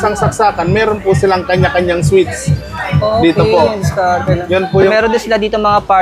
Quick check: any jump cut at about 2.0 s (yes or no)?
no